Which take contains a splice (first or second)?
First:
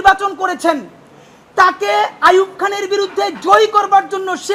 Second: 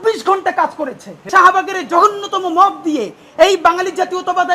second